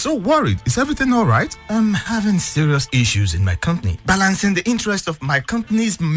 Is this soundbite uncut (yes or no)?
yes